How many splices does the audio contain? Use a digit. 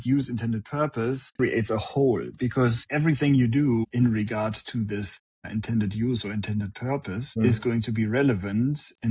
1